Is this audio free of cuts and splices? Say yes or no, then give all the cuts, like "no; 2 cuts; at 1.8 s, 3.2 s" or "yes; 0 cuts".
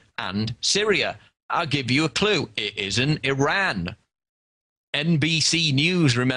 yes; 0 cuts